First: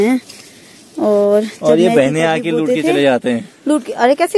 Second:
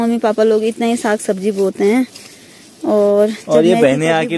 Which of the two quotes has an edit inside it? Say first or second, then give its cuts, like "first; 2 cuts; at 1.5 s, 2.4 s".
first; 1 cut; at 3.5 s